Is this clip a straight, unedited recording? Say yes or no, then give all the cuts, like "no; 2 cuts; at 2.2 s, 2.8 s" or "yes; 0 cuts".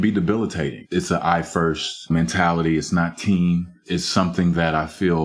yes; 0 cuts